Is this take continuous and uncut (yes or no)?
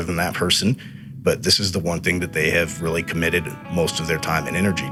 yes